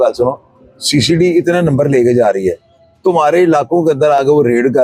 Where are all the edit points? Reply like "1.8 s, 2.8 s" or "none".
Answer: none